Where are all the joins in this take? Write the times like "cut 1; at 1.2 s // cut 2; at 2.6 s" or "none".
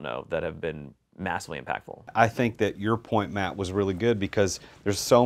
cut 1; at 2.1 s